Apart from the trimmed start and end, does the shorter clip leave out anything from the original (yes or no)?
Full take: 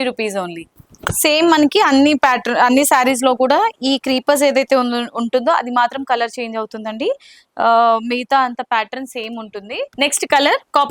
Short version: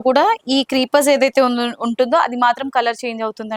no